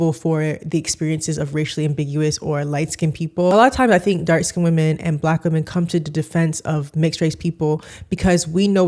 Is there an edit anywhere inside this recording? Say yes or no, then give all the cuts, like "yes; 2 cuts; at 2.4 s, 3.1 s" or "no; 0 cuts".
yes; 1 cut; at 3.5 s